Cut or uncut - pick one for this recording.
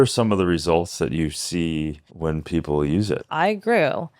cut